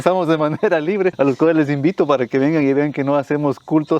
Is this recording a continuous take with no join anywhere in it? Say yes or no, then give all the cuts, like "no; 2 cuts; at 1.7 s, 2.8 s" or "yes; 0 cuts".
no; 1 cut; at 1.1 s